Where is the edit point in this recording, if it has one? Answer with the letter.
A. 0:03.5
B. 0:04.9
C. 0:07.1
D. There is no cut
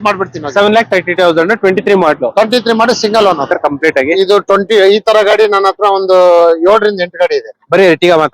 A